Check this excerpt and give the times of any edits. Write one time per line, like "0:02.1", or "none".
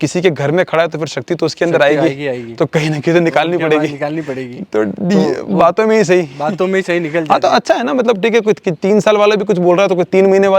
none

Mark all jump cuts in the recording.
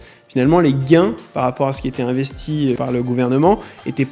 0:02.8

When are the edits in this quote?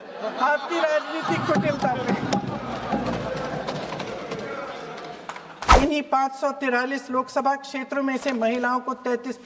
0:05.5

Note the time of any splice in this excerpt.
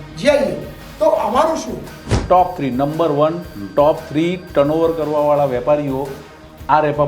0:02.1

